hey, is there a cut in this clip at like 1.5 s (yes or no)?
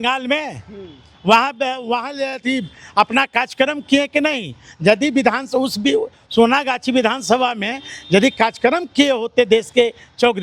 no